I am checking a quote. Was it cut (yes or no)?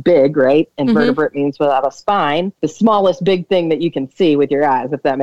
yes